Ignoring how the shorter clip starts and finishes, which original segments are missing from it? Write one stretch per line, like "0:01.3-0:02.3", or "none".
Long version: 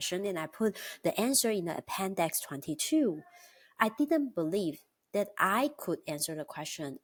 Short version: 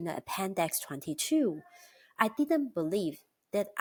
none